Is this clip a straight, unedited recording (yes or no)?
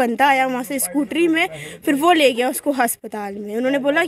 yes